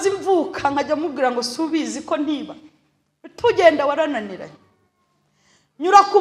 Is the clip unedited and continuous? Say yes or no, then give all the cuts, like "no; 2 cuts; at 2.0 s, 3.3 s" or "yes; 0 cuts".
yes; 0 cuts